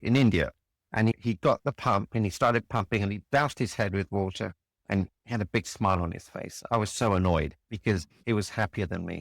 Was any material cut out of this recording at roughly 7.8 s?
yes; 1 cut; at 7.8 s

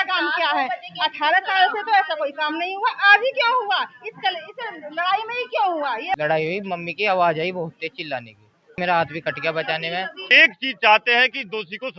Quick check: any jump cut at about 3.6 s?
no; 3 cuts; at 6.2 s, 8.8 s, 10.3 s

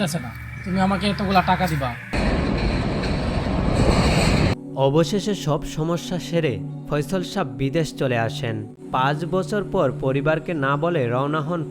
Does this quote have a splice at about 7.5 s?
no; 2 cuts; at 2.1 s, 8.7 s

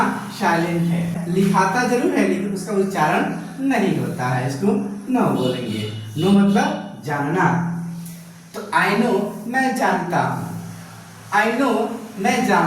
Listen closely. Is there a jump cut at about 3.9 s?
no; 1 cut; at 1.2 s

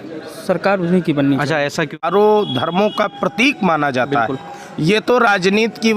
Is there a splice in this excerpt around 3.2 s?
no; 1 cut; at 2.0 s

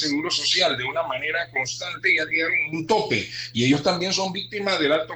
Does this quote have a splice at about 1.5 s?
no; 0 cuts

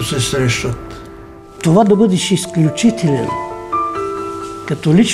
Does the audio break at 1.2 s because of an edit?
yes; 1 cut; at 1.2 s

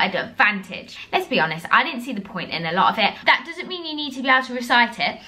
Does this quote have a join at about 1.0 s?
yes; 2 cuts; at 1.0 s, 3.2 s

